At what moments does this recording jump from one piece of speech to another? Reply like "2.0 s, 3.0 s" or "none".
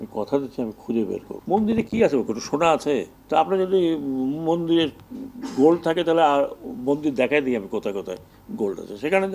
1.3 s, 3.1 s